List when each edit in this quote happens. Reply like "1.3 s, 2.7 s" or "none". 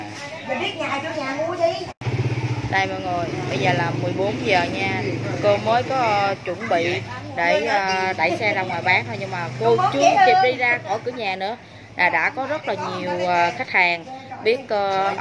2.0 s